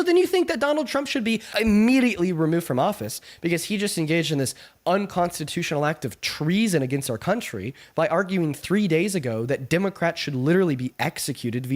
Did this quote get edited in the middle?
yes; 1 cut; at 1.5 s

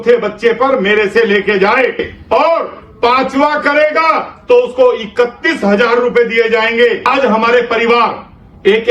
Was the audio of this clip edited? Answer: yes; 2 cuts; at 2.1 s, 7.1 s

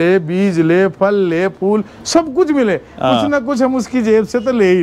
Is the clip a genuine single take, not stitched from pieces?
yes; 0 cuts

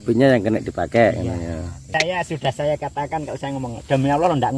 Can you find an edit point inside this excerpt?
yes; 1 cut; at 1.8 s

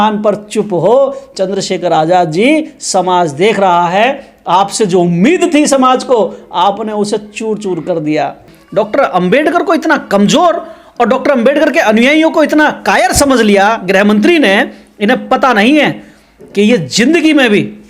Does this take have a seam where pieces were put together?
yes; 1 cut; at 8.5 s

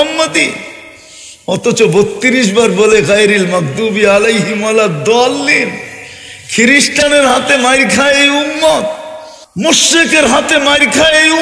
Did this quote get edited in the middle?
yes; 1 cut; at 9.6 s

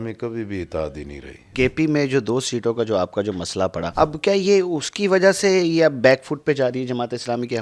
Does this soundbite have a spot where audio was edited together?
yes; 2 cuts; at 1.5 s, 3.8 s

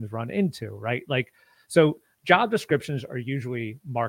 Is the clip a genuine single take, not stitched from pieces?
yes; 0 cuts

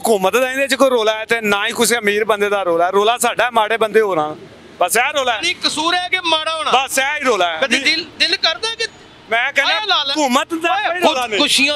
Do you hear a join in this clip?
no; 0 cuts

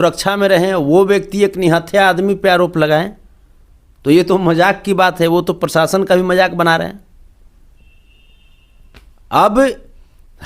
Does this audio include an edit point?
no; 0 cuts

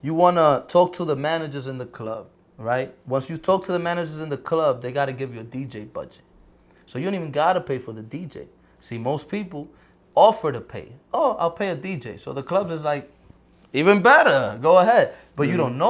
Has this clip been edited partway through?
no; 0 cuts

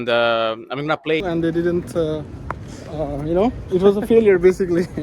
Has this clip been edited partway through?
yes; 1 cut; at 1.2 s

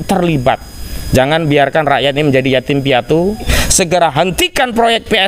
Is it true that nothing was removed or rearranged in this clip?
no; 1 cut; at 3.5 s

